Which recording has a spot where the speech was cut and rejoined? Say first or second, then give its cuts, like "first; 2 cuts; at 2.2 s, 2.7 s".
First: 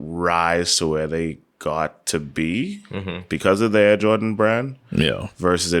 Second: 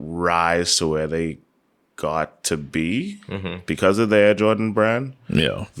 first; 1 cut; at 1.5 s